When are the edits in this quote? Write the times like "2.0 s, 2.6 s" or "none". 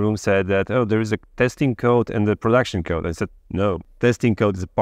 none